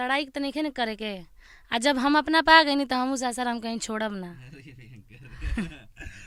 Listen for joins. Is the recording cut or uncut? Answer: uncut